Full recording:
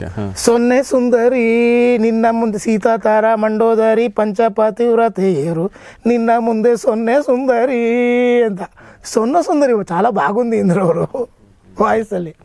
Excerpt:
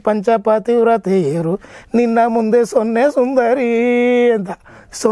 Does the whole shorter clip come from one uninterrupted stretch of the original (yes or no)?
yes